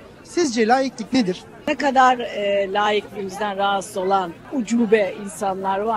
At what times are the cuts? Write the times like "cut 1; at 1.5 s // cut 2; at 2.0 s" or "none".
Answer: cut 1; at 1.6 s // cut 2; at 4.4 s